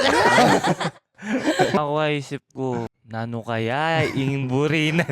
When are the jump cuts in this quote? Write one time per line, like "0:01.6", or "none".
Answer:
0:01.8
0:03.0